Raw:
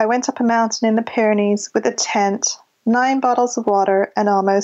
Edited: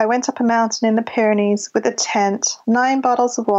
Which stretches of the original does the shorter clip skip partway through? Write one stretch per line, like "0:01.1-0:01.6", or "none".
0:02.5-0:02.7